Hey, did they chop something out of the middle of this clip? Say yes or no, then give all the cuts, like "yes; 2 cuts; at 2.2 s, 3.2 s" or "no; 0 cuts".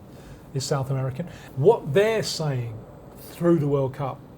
yes; 1 cut; at 1.4 s